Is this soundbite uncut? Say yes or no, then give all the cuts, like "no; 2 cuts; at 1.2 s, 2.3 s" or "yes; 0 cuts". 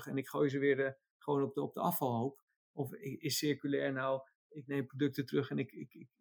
yes; 0 cuts